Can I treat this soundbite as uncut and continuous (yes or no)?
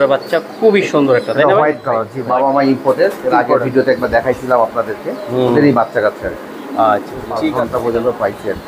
no